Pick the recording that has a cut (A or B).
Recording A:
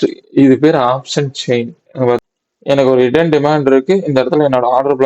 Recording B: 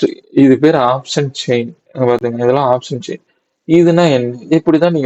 A